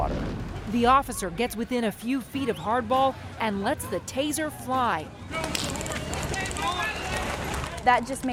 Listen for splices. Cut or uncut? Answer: uncut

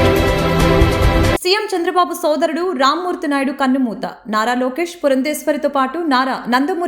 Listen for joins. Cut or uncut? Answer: cut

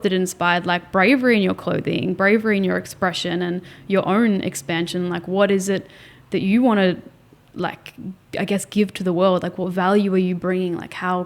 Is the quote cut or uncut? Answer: uncut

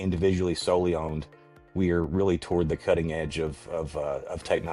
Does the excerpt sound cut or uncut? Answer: uncut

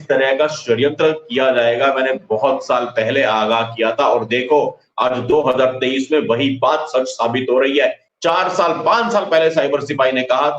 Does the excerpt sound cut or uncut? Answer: cut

